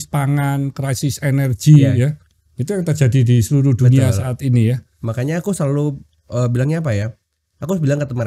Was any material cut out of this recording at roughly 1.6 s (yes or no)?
no